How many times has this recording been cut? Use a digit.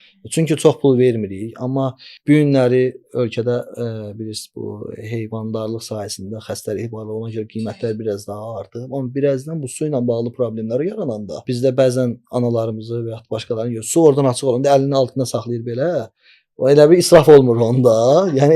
2